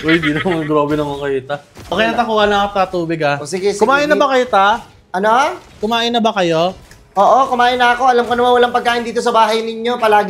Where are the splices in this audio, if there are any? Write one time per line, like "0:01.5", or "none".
0:01.8